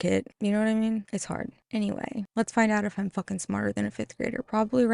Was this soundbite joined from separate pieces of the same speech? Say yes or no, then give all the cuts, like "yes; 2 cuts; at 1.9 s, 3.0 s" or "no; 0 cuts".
no; 0 cuts